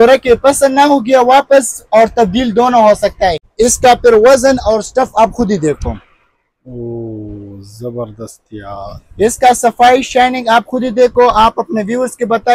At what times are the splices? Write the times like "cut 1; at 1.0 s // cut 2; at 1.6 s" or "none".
cut 1; at 3.4 s

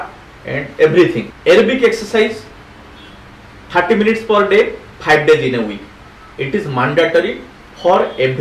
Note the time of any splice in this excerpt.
cut 1; at 1.3 s

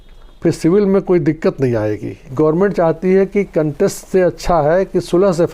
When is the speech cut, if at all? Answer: cut 1; at 2.3 s

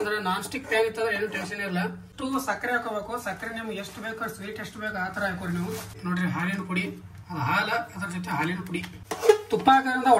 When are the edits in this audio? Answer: cut 1; at 2.1 s // cut 2; at 5.9 s // cut 3; at 9.0 s

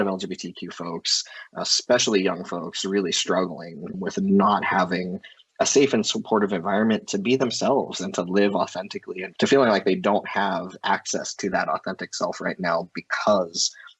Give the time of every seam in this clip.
none

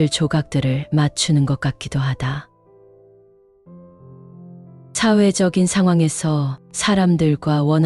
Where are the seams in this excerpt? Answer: none

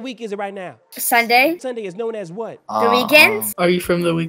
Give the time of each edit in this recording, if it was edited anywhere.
cut 1; at 1.6 s // cut 2; at 3.5 s

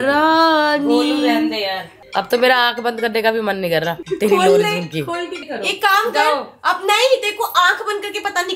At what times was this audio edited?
none

